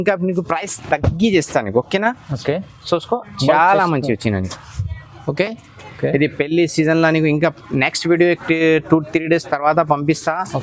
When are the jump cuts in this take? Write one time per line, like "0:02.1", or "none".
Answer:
0:05.8